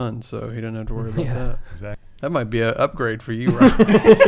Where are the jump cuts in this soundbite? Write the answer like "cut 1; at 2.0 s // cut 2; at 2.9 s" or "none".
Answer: cut 1; at 2.0 s

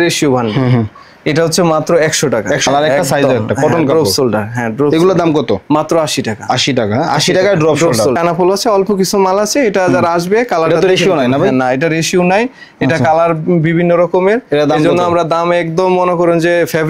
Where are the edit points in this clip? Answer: cut 1; at 2.7 s // cut 2; at 8.2 s

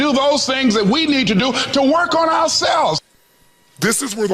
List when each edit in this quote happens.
cut 1; at 3.0 s

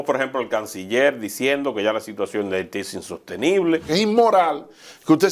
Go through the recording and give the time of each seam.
cut 1; at 3.8 s

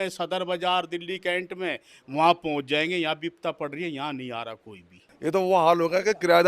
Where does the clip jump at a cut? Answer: cut 1; at 5.1 s

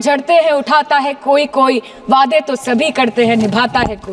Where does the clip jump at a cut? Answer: none

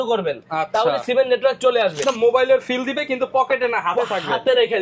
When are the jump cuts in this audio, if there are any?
cut 1; at 2.0 s

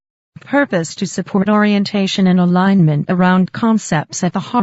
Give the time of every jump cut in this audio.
cut 1; at 1.3 s

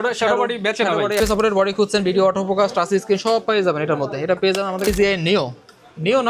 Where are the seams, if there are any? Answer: cut 1; at 1.2 s // cut 2; at 4.9 s

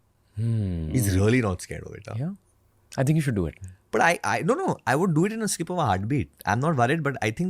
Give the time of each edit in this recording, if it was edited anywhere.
cut 1; at 1.2 s

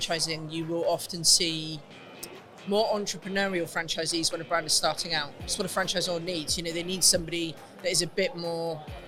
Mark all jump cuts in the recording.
none

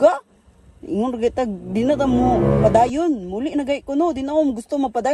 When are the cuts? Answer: none

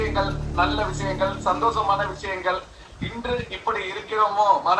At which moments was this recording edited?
none

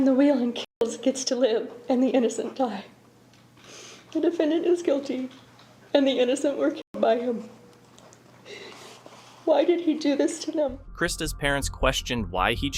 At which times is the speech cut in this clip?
none

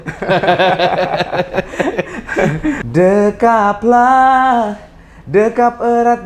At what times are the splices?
cut 1; at 2.8 s

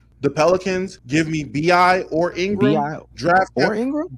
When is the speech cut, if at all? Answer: cut 1; at 0.9 s // cut 2; at 2.3 s

